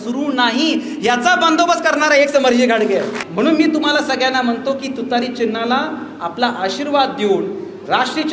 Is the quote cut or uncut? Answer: cut